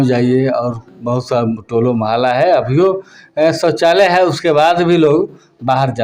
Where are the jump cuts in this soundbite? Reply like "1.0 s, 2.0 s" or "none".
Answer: none